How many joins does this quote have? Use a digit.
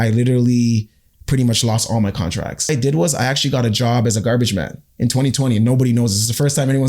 1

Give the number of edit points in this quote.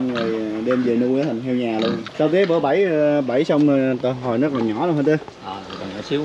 1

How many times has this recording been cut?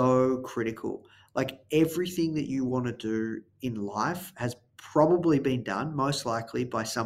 0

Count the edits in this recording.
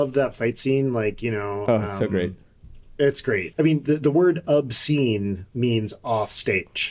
1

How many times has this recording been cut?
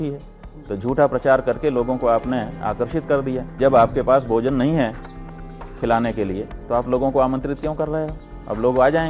1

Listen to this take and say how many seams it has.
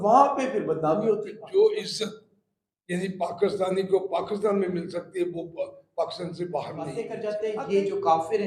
2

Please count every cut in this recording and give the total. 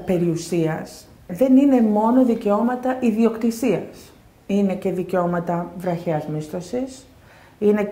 1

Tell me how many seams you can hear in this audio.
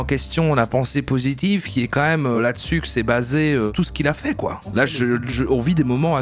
3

